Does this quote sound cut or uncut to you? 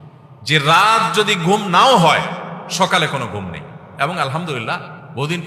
uncut